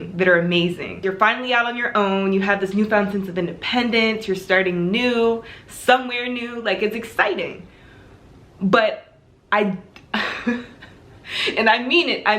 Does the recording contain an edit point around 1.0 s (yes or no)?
yes